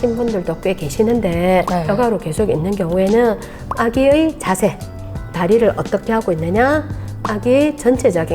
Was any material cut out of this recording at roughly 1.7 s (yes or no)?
yes